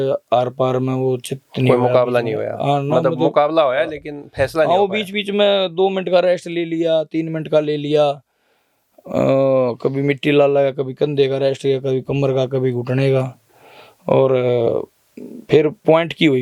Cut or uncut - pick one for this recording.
uncut